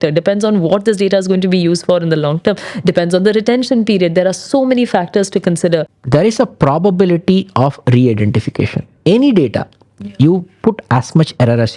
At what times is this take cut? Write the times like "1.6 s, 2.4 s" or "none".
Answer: 5.9 s